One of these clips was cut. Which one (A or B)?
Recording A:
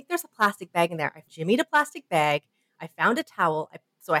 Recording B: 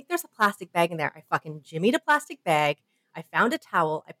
A